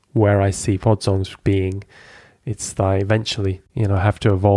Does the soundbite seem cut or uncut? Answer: cut